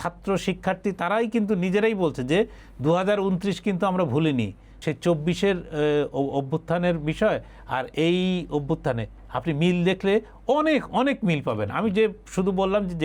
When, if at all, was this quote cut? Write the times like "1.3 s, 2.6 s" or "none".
4.8 s